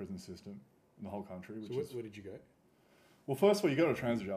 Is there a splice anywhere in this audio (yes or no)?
no